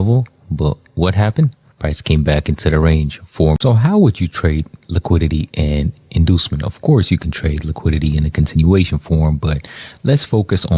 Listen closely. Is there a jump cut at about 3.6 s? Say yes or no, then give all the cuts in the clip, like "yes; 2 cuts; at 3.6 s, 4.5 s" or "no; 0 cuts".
yes; 1 cut; at 3.6 s